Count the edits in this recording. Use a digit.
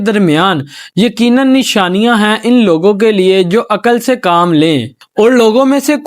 1